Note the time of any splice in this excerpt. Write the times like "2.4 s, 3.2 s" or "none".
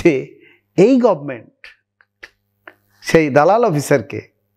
none